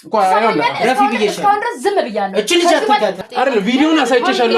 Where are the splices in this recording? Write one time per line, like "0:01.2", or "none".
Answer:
0:03.2